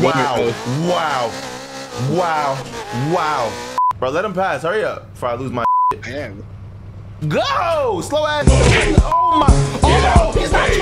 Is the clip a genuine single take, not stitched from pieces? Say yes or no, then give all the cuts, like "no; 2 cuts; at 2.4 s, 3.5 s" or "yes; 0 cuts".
no; 1 cut; at 3.8 s